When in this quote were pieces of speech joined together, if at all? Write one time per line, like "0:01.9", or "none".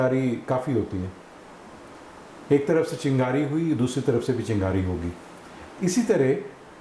none